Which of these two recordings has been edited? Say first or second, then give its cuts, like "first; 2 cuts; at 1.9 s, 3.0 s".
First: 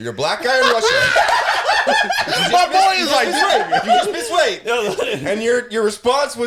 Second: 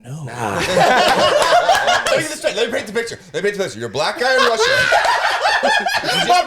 second; 1 cut; at 2.1 s